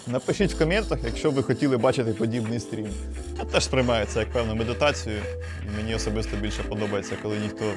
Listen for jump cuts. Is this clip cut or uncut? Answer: cut